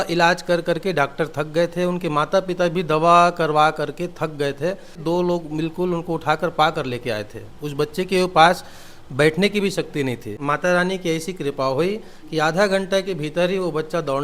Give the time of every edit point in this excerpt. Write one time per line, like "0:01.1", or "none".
0:05.0
0:10.4